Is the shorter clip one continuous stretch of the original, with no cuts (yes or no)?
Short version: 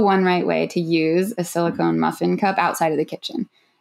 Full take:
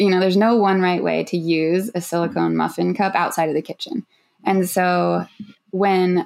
yes